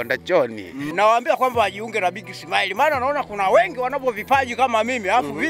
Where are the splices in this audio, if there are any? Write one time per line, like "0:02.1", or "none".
0:00.9